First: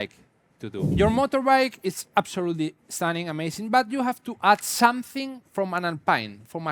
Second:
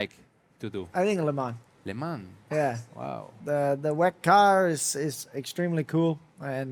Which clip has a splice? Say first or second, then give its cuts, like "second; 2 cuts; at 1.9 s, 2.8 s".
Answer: first; 1 cut; at 0.9 s